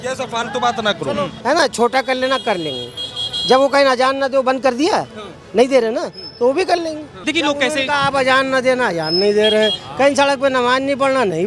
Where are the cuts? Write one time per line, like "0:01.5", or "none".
0:01.3
0:07.3